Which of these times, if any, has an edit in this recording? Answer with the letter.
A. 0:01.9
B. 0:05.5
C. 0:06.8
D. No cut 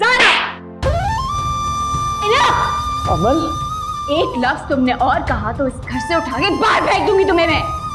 D